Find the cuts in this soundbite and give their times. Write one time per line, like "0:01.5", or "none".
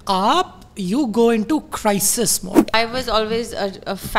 0:02.7